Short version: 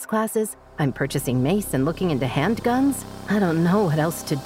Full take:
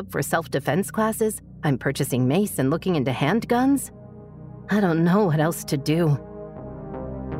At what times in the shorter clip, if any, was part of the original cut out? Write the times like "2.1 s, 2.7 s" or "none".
3.1 s